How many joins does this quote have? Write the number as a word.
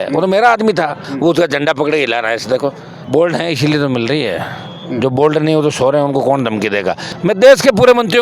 three